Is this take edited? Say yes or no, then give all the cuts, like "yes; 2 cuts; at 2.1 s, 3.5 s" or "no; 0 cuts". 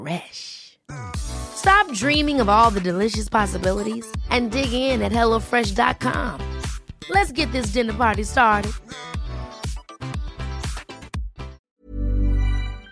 yes; 1 cut; at 11.6 s